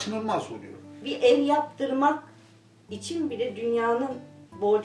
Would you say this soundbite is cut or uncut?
cut